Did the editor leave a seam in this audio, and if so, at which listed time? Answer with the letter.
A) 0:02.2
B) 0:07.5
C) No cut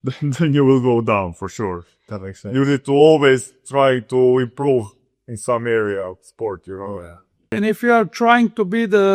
B